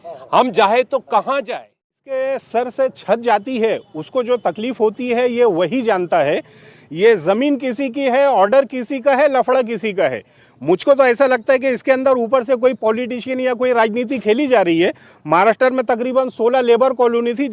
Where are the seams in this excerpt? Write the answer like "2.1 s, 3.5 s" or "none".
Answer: 2.0 s